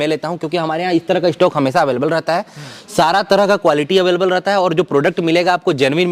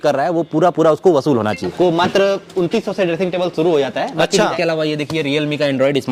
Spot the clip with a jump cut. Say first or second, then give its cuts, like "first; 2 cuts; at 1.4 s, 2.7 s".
second; 2 cuts; at 1.7 s, 4.5 s